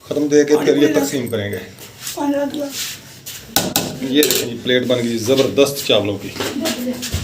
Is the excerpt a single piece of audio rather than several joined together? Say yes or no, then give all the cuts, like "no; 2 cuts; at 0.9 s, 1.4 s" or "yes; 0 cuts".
no; 1 cut; at 2.7 s